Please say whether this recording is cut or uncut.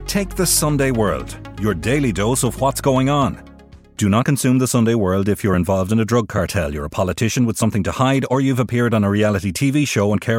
uncut